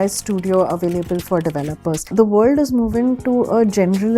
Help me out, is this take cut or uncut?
cut